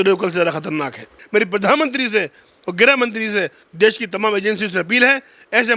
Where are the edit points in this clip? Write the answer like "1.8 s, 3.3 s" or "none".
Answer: 1.2 s